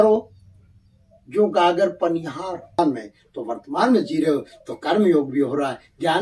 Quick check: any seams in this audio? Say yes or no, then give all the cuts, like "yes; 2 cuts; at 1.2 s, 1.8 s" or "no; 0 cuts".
yes; 1 cut; at 2.8 s